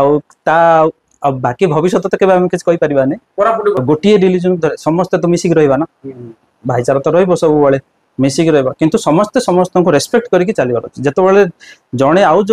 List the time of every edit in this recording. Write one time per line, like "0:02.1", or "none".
0:03.8